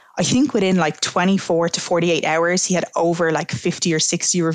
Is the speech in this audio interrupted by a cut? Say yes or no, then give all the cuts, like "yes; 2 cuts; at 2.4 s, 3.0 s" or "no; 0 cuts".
no; 0 cuts